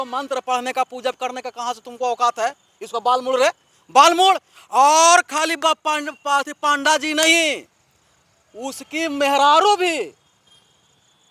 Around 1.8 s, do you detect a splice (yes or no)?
no